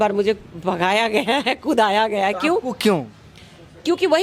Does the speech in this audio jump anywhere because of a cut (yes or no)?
no